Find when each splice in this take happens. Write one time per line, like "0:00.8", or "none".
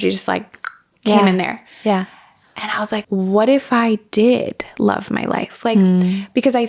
0:03.0

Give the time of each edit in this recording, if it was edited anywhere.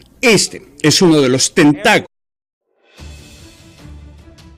none

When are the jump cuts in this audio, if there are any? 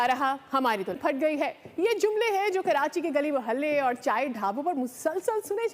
0:01.0

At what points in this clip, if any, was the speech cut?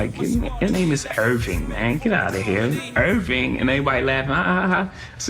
none

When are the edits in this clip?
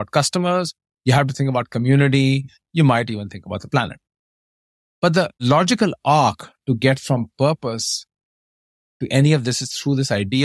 0:05.4

